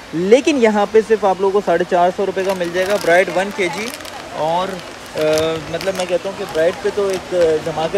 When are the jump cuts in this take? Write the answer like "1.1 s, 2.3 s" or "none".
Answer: none